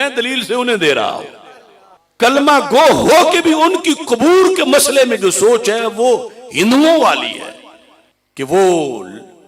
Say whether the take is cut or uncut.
uncut